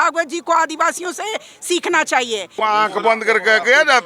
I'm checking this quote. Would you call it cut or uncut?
cut